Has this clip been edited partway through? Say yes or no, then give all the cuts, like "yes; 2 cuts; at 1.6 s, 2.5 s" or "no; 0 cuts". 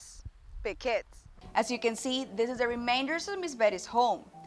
yes; 1 cut; at 1.2 s